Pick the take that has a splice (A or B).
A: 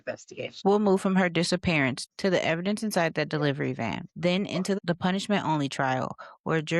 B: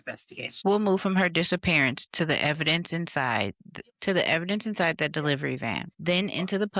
A